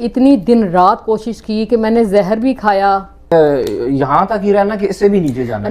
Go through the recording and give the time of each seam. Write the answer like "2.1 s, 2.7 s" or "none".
3.3 s